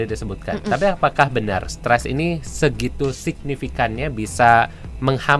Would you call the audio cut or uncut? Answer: uncut